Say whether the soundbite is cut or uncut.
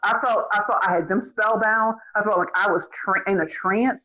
uncut